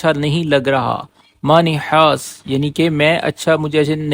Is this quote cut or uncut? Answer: uncut